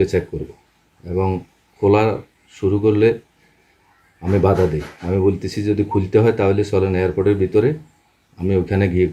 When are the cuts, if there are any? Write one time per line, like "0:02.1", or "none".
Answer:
none